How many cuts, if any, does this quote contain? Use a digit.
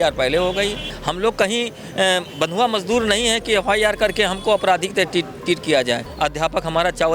2